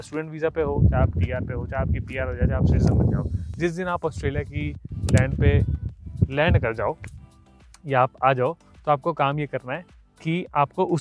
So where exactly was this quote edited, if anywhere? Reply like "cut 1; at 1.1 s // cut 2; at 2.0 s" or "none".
none